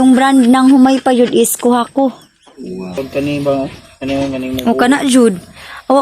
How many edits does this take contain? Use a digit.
1